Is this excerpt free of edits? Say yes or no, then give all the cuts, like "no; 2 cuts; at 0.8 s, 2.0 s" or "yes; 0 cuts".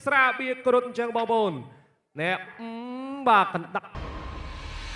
no; 1 cut; at 3.9 s